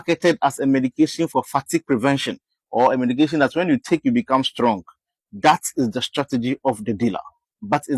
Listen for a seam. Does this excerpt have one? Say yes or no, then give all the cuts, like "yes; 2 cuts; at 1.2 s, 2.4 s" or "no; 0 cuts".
no; 0 cuts